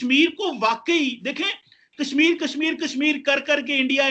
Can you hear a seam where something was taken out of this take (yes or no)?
no